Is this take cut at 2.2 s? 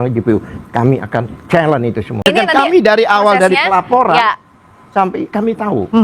yes; 1 cut; at 2.2 s

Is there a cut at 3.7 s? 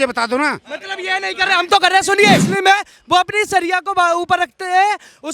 no; 1 cut; at 2.5 s

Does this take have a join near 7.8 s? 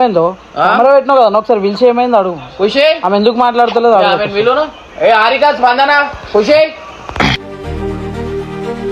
no; 0 cuts

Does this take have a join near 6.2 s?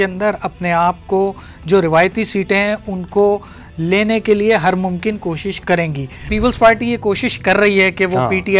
yes; 1 cut; at 6.2 s

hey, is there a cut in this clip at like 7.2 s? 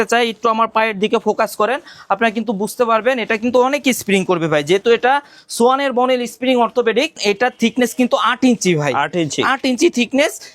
yes; 1 cut; at 7.2 s

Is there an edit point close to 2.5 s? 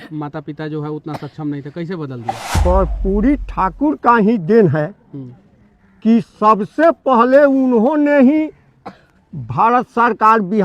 yes; 1 cut; at 2.5 s

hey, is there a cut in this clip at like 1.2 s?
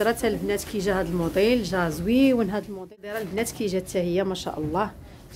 no; 1 cut; at 3.0 s

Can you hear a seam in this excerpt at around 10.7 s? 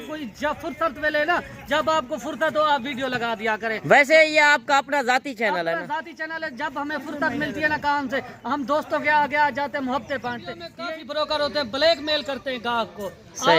yes; 1 cut; at 10.7 s

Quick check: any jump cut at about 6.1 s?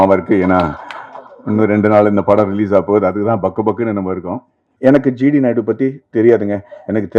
no; 1 cut; at 4.7 s

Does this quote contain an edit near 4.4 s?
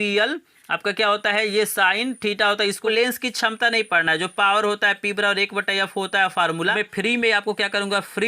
no; 2 cuts; at 2.8 s, 6.7 s

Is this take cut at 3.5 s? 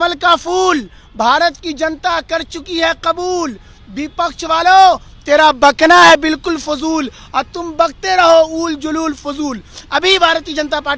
no; 0 cuts

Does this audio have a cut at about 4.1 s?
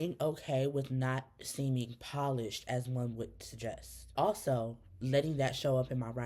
yes; 1 cut; at 4.1 s

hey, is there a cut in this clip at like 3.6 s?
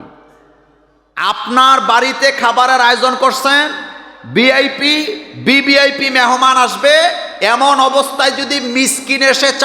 no; 1 cut; at 1.5 s

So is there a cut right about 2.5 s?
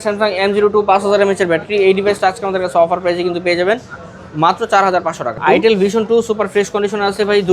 no; 1 cut; at 5.4 s

